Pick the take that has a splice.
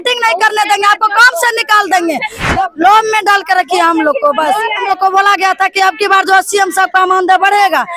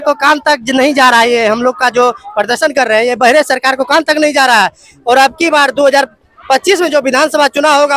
first; 2 cuts; at 2.4 s, 4.9 s

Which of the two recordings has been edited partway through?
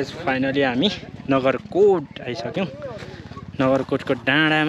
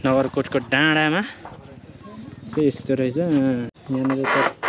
second; 1 cut; at 3.8 s

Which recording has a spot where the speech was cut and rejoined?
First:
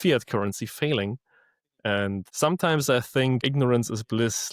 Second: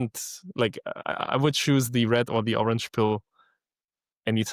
first; 2 cuts; at 2.3 s, 3.4 s

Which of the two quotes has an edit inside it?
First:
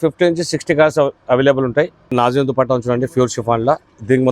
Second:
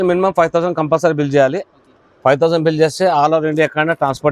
first; 1 cut; at 2.1 s

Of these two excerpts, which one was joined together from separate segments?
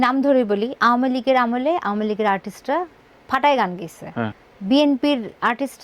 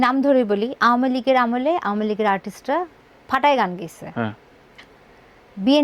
first; 1 cut; at 4.5 s

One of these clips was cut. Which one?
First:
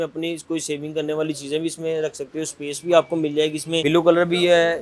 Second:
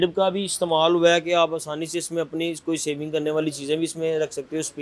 first; 1 cut; at 3.8 s

